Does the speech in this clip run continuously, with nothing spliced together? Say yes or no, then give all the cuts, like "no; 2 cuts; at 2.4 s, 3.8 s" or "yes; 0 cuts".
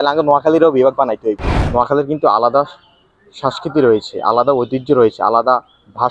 no; 1 cut; at 1.5 s